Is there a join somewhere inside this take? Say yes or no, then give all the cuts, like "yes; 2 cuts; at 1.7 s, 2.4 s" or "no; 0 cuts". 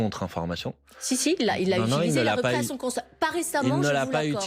no; 0 cuts